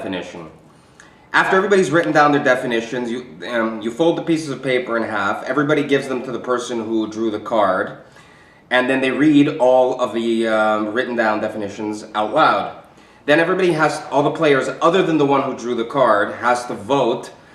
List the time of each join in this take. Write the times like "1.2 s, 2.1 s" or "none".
8.3 s

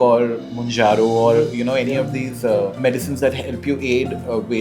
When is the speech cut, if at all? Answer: 2.7 s

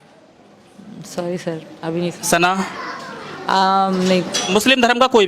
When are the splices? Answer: 4.4 s

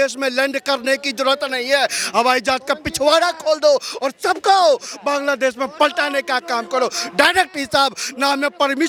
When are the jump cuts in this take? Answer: none

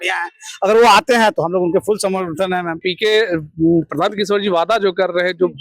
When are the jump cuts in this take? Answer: 2.9 s

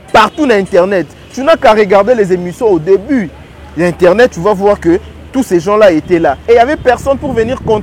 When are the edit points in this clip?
none

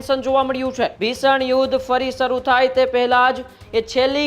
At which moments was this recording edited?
1.0 s

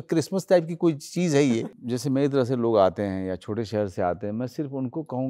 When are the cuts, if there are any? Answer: 1.6 s

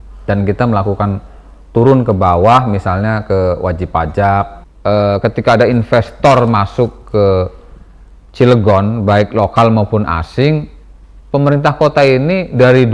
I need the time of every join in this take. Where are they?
4.6 s

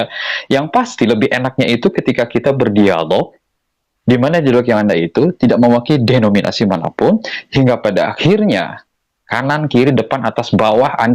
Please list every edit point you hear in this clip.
none

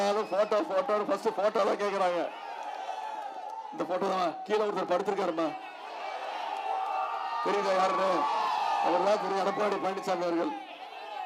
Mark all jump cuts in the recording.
none

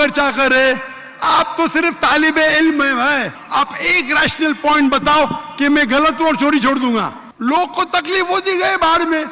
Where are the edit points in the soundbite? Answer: 3.4 s, 7.2 s

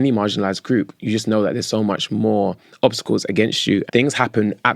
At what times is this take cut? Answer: 3.9 s

